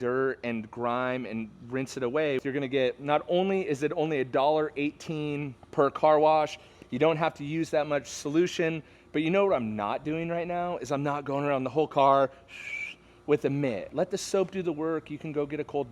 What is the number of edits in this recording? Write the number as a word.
three